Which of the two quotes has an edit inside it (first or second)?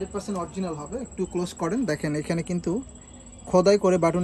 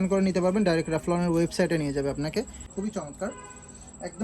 second